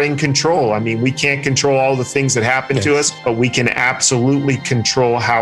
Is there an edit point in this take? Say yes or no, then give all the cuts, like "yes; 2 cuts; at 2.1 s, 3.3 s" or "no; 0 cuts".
no; 0 cuts